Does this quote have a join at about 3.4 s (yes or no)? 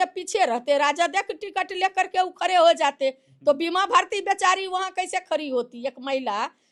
no